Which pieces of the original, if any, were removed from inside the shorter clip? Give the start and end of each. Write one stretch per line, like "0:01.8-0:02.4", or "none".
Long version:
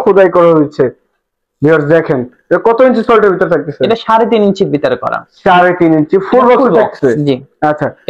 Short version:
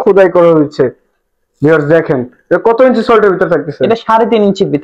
none